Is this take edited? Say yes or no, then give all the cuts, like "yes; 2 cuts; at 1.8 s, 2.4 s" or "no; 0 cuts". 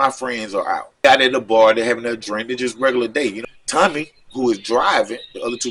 yes; 2 cuts; at 1.0 s, 3.4 s